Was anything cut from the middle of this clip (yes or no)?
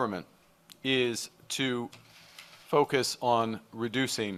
no